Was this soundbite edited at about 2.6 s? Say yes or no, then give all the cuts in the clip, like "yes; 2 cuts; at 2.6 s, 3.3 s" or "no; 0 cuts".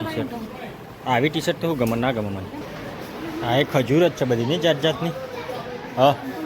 yes; 1 cut; at 2.6 s